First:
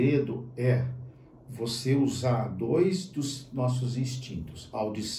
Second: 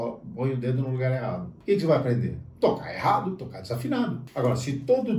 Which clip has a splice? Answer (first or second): second